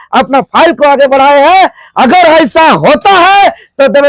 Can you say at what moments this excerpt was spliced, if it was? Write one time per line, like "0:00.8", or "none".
none